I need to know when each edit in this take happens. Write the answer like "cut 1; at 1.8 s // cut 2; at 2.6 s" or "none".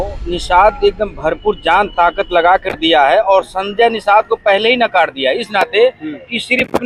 none